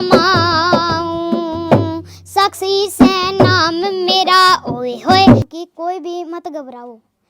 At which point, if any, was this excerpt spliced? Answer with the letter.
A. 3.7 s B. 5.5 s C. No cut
B